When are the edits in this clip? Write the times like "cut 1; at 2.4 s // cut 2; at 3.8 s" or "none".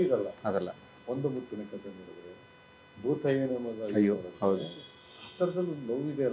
cut 1; at 1.0 s

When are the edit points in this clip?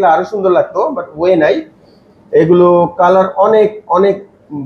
none

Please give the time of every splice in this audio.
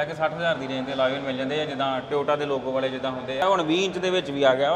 cut 1; at 3.4 s

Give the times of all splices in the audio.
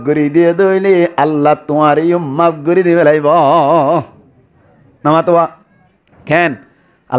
none

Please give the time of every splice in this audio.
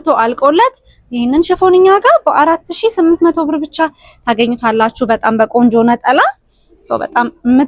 none

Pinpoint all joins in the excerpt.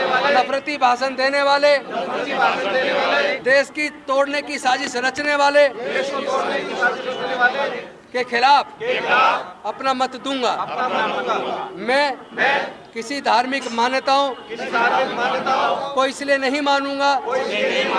none

